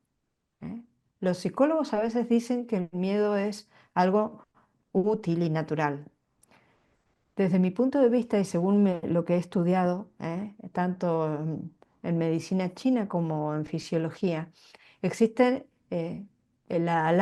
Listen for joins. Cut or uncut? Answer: uncut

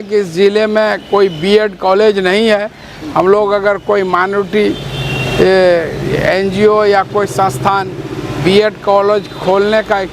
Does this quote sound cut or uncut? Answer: uncut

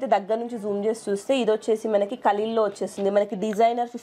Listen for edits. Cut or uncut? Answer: uncut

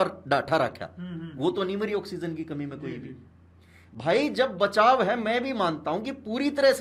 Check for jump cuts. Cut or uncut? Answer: uncut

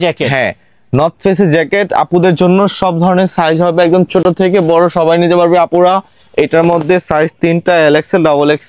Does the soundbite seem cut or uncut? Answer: uncut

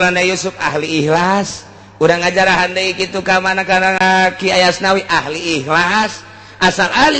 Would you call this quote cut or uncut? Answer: cut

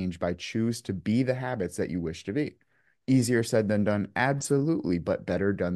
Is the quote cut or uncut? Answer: uncut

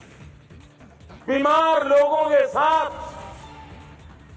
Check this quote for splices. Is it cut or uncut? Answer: cut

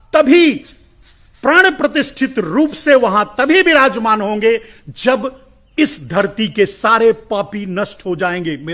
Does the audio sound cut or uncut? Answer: uncut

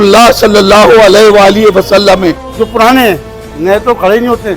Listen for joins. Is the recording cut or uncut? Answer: cut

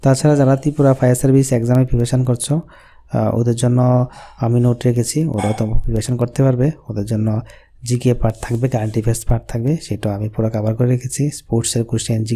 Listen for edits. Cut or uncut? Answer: uncut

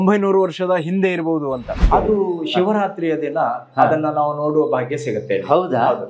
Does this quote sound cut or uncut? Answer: cut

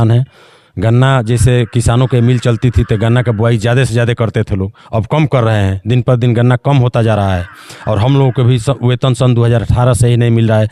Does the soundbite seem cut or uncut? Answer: uncut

